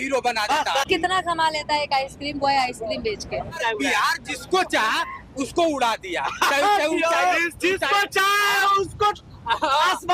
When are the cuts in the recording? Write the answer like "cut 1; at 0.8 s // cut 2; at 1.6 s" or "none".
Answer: cut 1; at 0.8 s // cut 2; at 3.6 s